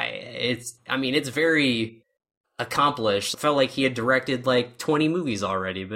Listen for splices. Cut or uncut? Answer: cut